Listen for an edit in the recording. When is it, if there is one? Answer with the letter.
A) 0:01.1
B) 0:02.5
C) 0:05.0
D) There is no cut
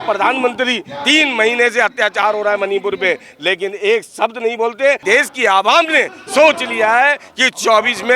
C